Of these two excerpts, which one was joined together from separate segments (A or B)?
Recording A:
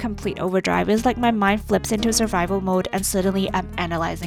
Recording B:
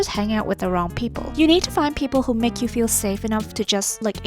B